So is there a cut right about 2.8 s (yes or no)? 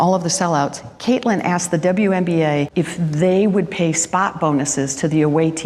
no